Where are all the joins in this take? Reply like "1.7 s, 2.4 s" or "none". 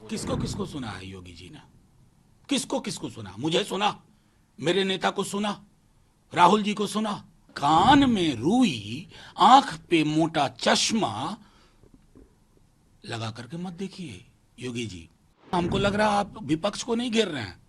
7.5 s, 15.5 s